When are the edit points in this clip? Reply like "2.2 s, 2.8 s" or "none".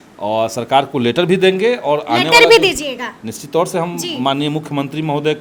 none